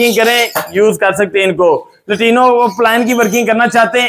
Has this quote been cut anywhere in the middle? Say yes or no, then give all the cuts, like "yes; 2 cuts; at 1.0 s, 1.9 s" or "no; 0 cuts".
no; 0 cuts